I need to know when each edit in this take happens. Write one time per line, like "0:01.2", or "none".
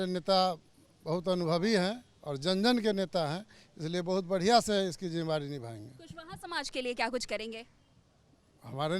none